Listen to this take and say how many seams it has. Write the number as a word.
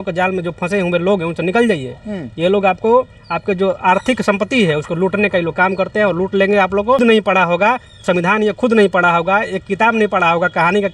one